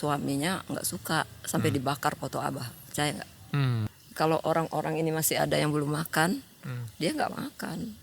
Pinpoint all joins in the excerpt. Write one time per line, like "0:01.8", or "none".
0:03.9